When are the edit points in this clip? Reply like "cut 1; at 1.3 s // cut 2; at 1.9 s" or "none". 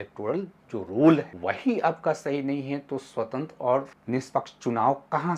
cut 1; at 1.3 s // cut 2; at 4.0 s